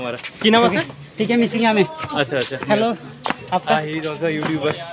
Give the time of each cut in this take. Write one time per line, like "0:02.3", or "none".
none